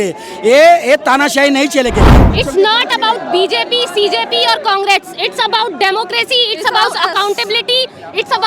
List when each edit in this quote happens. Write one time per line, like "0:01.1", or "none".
0:02.2